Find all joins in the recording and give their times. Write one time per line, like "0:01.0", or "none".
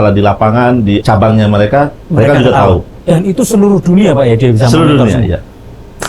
0:01.0
0:02.0
0:02.9